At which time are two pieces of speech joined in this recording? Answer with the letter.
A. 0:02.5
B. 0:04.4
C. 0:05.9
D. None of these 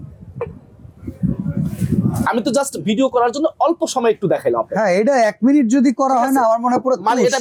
D